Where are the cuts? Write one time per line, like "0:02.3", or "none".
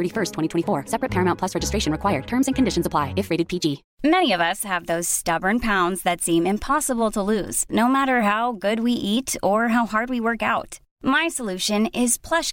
0:03.9